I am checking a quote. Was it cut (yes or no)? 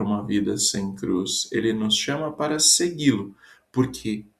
yes